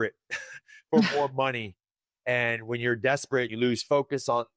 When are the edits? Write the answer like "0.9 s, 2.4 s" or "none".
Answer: 3.5 s